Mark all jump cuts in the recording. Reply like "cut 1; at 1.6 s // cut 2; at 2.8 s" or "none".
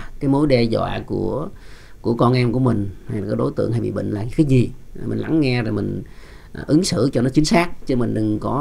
none